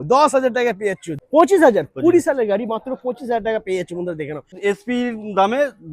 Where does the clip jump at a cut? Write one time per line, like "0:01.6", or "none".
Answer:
0:01.1
0:04.5